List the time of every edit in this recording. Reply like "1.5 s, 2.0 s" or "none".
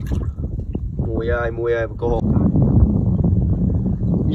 2.2 s